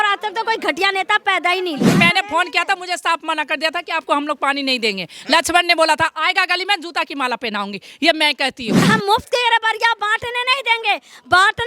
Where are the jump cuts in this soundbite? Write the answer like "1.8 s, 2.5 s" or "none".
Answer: 1.9 s, 8.9 s